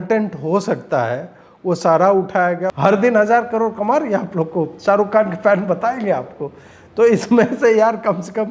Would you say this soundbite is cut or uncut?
cut